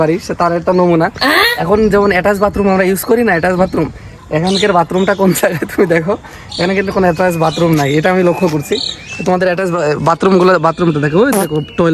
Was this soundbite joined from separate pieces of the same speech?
no; 0 cuts

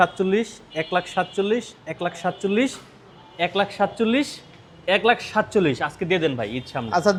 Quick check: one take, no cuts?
yes; 0 cuts

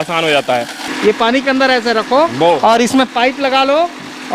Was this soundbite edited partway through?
yes; 1 cut; at 0.9 s

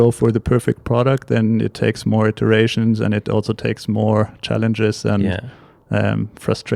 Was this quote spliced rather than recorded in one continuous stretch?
no; 0 cuts

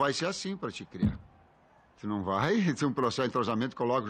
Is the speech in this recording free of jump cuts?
yes; 0 cuts

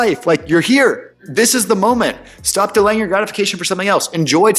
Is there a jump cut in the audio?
yes; 1 cut; at 1.2 s

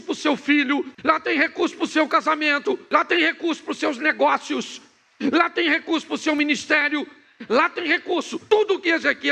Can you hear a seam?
yes; 3 cuts; at 0.9 s, 2.8 s, 8.4 s

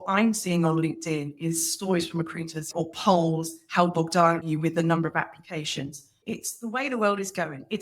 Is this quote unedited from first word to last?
no; 3 cuts; at 2.7 s, 4.5 s, 6.2 s

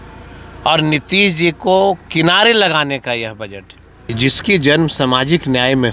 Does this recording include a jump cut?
yes; 1 cut; at 4.1 s

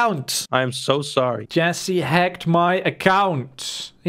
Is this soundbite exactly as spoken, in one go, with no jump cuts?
no; 1 cut; at 1.4 s

